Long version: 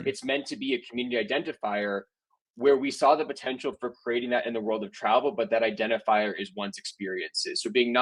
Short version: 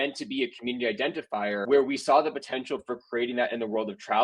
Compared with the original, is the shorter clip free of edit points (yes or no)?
no